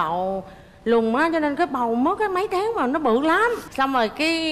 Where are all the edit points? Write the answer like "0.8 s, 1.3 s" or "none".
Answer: none